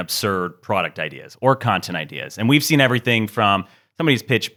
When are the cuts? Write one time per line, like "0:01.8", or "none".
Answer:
none